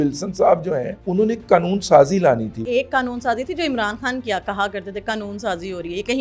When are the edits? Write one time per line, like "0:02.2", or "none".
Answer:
0:01.0
0:02.6